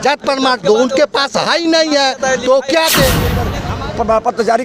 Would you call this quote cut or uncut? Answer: cut